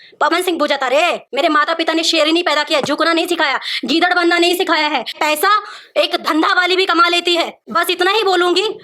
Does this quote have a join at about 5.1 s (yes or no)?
yes